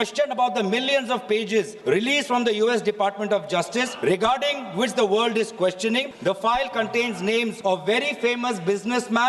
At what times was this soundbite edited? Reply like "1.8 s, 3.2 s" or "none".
1.7 s, 3.9 s, 6.1 s, 7.6 s